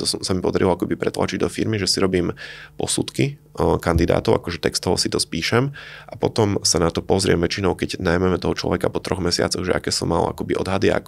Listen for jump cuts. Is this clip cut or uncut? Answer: uncut